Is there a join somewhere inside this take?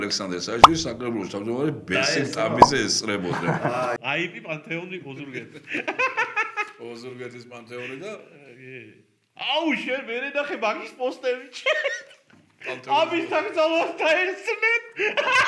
yes; 1 cut; at 4.0 s

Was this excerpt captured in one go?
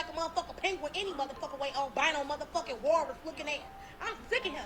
yes; 0 cuts

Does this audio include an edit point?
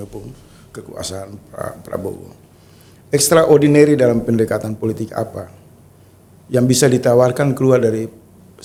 no; 0 cuts

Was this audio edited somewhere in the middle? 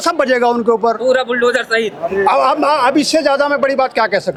no; 0 cuts

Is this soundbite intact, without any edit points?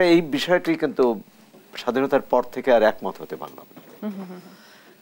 yes; 0 cuts

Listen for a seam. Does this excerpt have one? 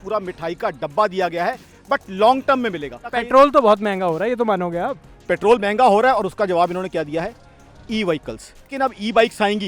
yes; 2 cuts; at 3.1 s, 8.7 s

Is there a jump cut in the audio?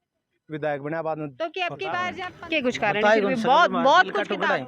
yes; 1 cut; at 2.2 s

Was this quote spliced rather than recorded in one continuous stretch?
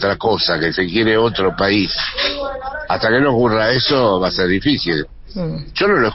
no; 0 cuts

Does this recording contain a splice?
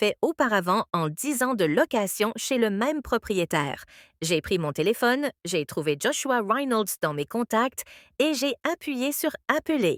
no; 0 cuts

